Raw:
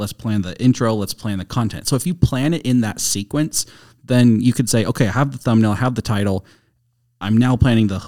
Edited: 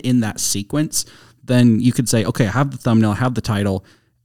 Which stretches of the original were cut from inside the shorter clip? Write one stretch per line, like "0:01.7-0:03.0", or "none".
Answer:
none